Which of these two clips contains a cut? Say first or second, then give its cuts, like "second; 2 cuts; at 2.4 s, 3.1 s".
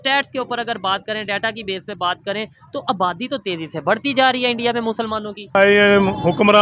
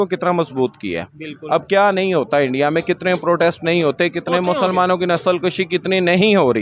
first; 1 cut; at 5.6 s